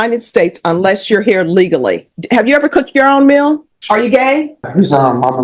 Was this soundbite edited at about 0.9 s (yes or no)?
no